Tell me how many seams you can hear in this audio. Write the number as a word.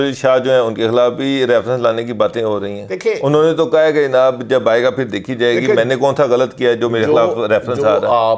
zero